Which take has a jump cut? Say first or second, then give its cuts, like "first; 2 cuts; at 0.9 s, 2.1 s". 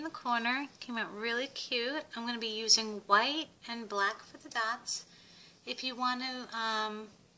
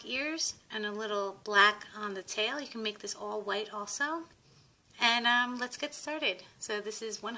second; 1 cut; at 1.5 s